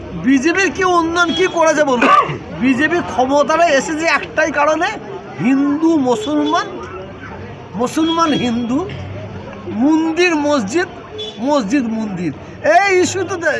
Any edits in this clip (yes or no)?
no